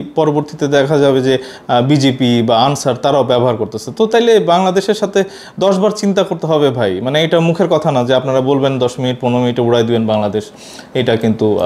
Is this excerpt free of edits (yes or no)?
yes